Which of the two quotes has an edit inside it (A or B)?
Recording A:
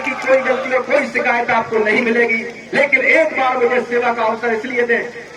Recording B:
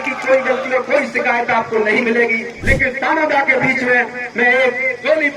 B